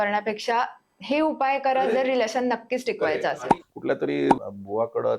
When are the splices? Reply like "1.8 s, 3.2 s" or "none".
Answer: 3.4 s